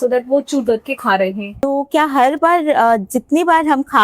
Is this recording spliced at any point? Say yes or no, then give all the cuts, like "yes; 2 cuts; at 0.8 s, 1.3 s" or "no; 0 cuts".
yes; 1 cut; at 1.7 s